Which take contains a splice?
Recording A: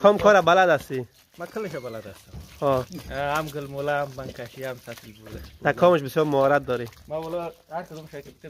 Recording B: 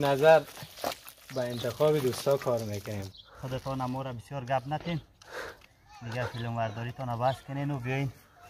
B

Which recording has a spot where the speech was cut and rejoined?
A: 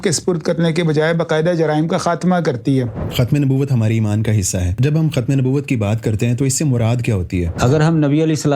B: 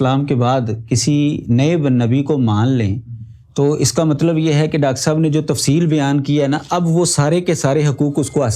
A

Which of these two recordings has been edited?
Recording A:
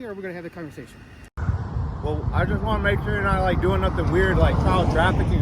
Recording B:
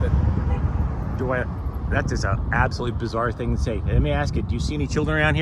A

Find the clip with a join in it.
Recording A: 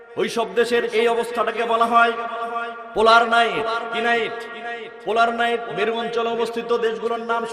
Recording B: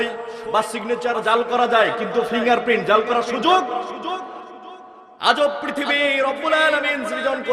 B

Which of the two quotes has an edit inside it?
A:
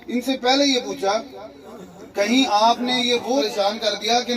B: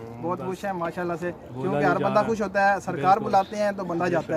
A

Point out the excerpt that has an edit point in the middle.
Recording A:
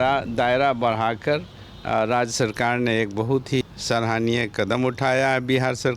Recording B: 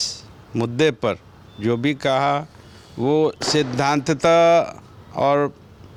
A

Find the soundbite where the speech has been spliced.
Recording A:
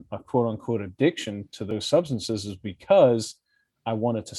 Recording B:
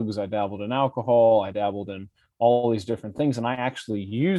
A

